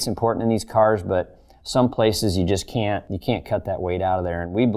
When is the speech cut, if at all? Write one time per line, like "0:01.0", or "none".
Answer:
0:03.1